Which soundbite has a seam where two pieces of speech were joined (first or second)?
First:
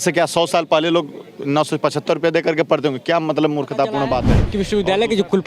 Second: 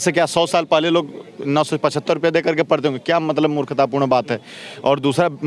first